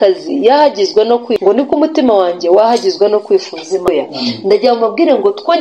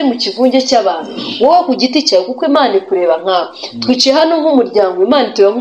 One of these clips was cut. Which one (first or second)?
first